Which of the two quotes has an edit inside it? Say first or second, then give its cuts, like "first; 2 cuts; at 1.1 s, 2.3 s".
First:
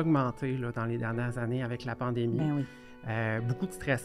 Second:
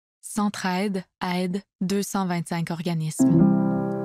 second; 1 cut; at 3.1 s